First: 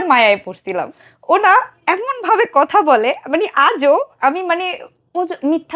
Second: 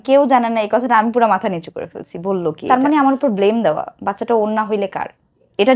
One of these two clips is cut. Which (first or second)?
second